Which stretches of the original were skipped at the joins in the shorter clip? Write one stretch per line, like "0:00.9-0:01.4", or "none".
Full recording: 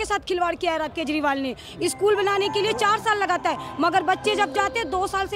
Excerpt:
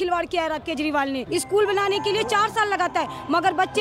0:01.5-0:01.7